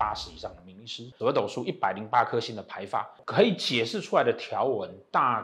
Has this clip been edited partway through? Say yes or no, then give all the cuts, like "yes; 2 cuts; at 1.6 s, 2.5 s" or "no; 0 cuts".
yes; 2 cuts; at 1.1 s, 3.2 s